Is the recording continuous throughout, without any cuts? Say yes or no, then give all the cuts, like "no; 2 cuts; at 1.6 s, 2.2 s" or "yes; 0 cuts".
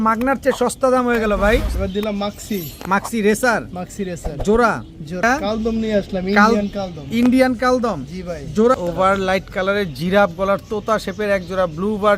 no; 3 cuts; at 1.7 s, 5.2 s, 8.8 s